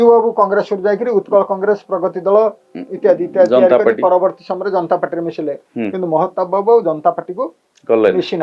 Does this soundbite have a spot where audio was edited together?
no; 0 cuts

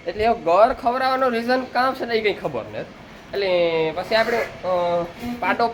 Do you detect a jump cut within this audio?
no; 0 cuts

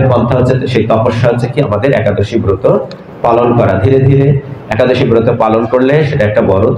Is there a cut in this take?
no; 0 cuts

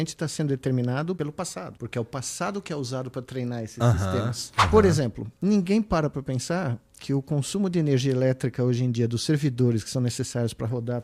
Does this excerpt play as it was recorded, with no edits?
no; 2 cuts; at 1.4 s, 4.5 s

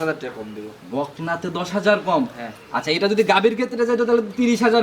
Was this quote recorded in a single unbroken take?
yes; 0 cuts

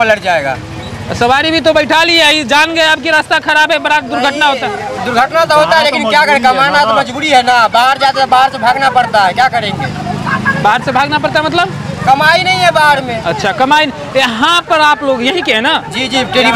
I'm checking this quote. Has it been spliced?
no; 0 cuts

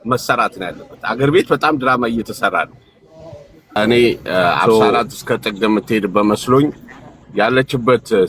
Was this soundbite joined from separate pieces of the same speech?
yes; 1 cut; at 3.7 s

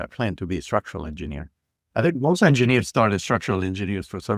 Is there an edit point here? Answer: no; 0 cuts

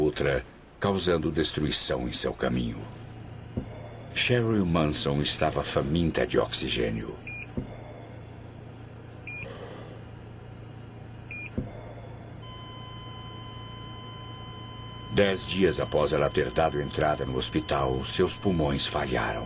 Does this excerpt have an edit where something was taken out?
yes; 1 cut; at 16.3 s

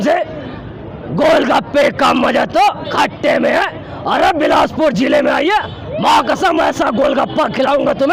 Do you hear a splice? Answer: no; 0 cuts

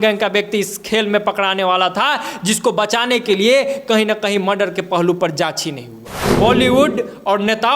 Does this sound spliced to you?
yes; 1 cut; at 6.2 s

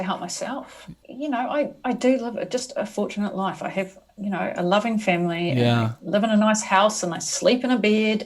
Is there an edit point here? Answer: yes; 1 cut; at 1.0 s

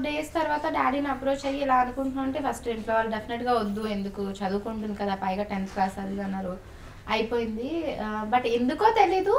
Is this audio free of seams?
yes; 0 cuts

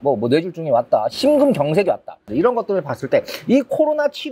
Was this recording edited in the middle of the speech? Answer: yes; 1 cut; at 2.3 s

